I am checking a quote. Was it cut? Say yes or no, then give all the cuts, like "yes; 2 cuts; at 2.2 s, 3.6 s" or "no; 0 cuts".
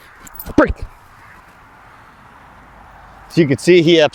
no; 0 cuts